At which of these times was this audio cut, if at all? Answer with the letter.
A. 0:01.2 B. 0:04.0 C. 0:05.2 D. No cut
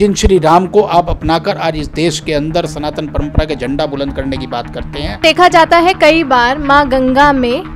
C